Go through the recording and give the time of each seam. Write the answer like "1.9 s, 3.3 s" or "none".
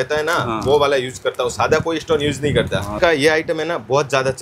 2.9 s